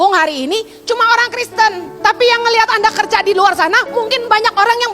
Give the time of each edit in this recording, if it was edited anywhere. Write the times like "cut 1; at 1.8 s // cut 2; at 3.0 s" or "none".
cut 1; at 1.9 s